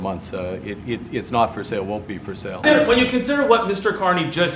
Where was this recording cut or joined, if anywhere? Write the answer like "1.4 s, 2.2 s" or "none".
2.6 s